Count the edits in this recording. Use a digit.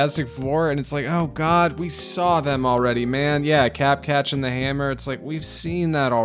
0